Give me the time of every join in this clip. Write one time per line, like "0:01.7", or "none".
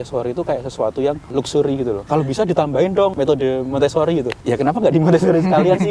0:01.6
0:03.1
0:04.3